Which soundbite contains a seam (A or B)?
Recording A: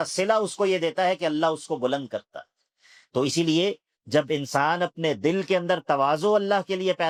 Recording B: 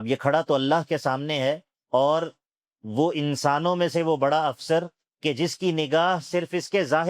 B